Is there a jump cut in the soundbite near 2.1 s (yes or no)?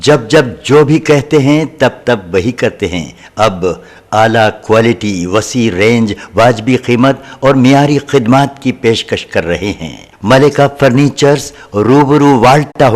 no